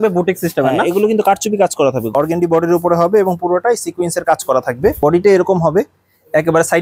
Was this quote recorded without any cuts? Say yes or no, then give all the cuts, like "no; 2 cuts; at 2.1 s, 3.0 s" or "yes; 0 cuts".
no; 2 cuts; at 2.1 s, 5.0 s